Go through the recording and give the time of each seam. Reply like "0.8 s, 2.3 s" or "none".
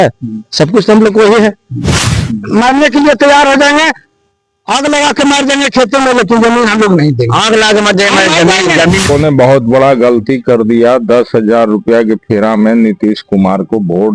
2.2 s, 9.1 s